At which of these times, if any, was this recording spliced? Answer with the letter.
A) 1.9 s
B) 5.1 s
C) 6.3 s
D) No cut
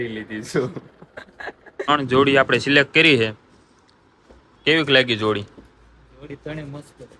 A